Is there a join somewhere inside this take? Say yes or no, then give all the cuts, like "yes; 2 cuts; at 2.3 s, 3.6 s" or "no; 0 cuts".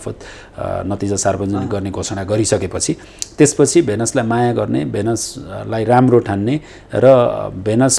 no; 0 cuts